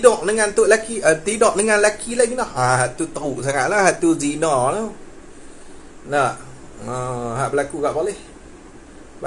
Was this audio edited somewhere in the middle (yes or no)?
no